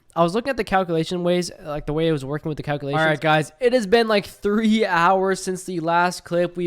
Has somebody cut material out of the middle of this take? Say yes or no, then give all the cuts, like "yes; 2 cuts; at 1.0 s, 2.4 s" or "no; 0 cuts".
yes; 1 cut; at 2.9 s